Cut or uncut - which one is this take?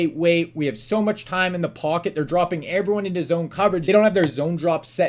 cut